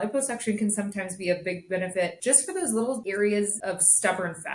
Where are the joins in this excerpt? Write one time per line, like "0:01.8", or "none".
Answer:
0:02.2
0:03.0
0:03.6